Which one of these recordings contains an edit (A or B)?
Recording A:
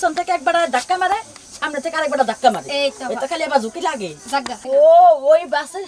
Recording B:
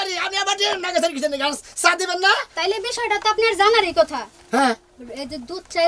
A